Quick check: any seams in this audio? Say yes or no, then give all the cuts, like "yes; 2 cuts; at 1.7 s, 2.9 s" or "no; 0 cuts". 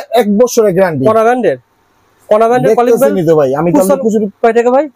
no; 0 cuts